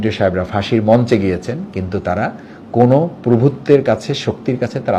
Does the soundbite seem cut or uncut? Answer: uncut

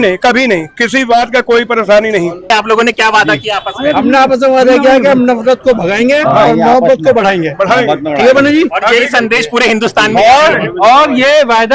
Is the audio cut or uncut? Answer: cut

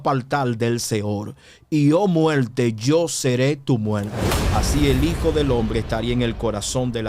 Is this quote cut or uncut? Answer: cut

